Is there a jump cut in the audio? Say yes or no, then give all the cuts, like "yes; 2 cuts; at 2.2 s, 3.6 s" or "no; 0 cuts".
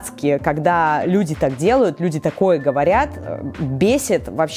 no; 0 cuts